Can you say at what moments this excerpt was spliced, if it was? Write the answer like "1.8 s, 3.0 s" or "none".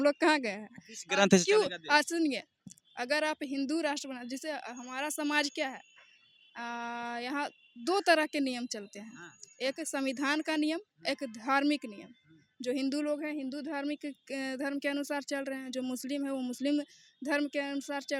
none